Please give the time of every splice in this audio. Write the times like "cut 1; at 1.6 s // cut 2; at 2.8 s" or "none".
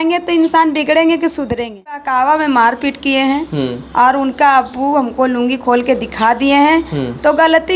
cut 1; at 2.1 s